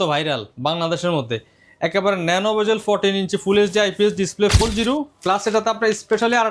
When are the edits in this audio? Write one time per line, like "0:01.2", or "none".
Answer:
0:04.6